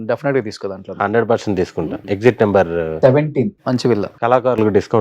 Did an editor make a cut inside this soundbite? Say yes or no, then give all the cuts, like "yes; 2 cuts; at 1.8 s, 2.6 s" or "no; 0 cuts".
yes; 2 cuts; at 2.0 s, 4.1 s